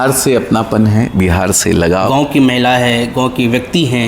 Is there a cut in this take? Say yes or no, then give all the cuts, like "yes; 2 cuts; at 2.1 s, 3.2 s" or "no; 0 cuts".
yes; 1 cut; at 2.1 s